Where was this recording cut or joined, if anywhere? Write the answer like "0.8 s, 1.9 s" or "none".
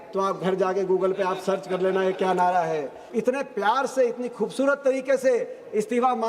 3.0 s